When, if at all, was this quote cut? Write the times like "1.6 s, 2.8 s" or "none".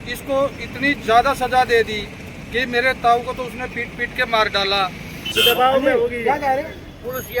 5.3 s